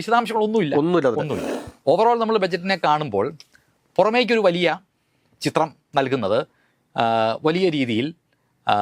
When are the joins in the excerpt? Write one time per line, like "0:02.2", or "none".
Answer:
0:01.4